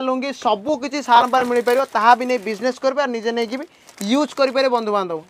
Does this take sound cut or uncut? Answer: uncut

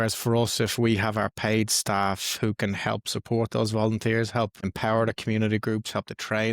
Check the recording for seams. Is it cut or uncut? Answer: cut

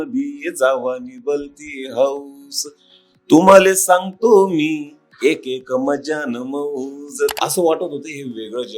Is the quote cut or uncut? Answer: cut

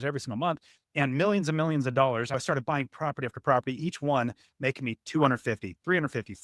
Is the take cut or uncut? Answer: cut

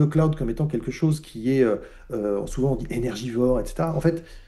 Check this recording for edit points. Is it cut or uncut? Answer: uncut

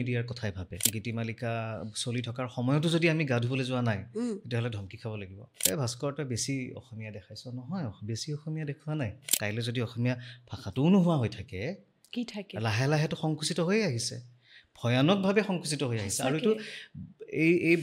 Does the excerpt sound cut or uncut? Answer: cut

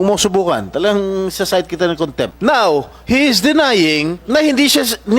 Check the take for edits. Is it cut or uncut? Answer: cut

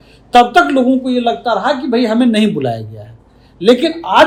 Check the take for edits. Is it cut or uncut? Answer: uncut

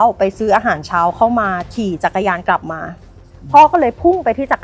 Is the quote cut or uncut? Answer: cut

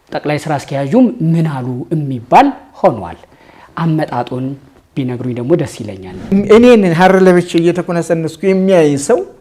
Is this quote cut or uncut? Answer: cut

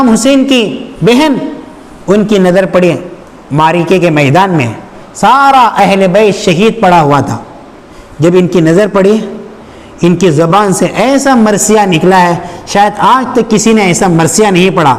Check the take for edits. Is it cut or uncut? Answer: uncut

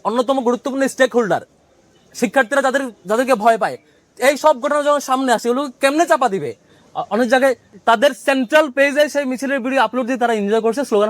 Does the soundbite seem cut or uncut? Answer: cut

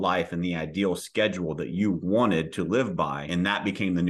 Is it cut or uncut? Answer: cut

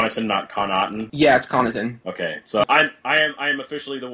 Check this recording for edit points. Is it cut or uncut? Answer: cut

